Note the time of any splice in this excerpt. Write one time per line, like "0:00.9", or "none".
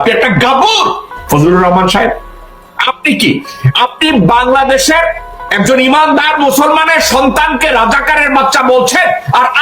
0:01.1